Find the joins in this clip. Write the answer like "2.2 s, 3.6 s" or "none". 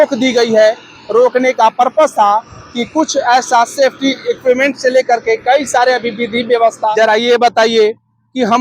6.9 s